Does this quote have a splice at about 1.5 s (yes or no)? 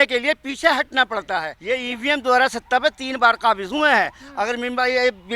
yes